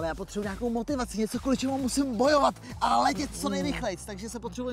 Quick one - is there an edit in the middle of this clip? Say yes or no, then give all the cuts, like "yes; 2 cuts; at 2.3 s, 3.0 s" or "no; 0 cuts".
no; 0 cuts